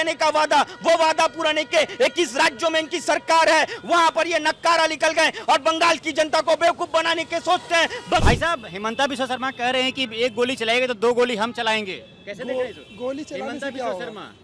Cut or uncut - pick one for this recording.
cut